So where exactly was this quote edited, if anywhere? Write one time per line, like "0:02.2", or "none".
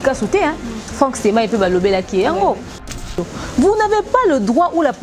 0:03.0